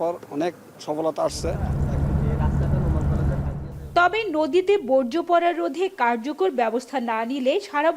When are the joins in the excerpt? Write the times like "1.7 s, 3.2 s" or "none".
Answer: none